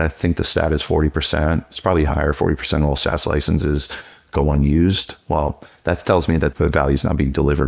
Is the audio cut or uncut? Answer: cut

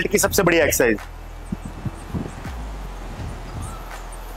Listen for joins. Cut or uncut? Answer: uncut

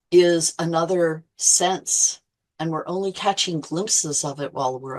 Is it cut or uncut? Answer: uncut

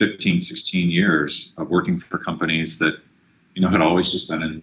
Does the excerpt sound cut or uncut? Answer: uncut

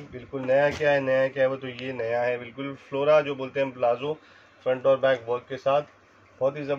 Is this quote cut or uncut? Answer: uncut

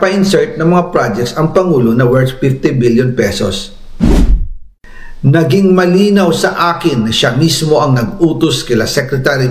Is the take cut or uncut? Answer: cut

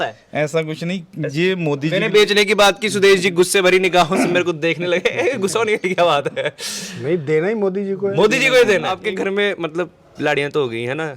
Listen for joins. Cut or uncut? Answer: cut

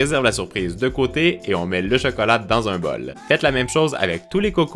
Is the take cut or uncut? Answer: cut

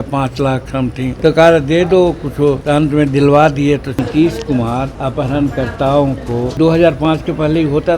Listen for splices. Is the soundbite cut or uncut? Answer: cut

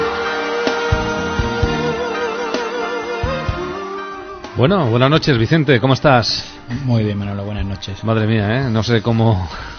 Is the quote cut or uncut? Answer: cut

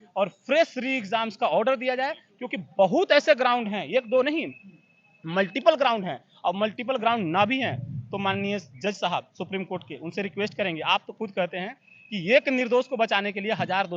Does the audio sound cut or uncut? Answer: uncut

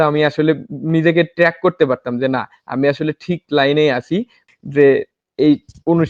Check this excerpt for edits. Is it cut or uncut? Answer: cut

